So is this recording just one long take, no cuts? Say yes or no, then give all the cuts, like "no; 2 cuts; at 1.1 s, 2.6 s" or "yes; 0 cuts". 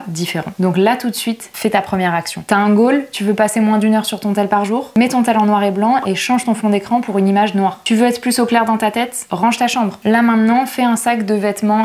yes; 0 cuts